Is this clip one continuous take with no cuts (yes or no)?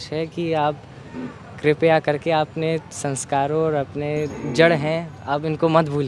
no